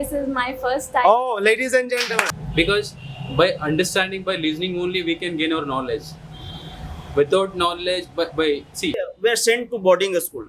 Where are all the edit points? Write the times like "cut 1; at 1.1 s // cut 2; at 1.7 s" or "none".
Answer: cut 1; at 2.4 s // cut 2; at 9.1 s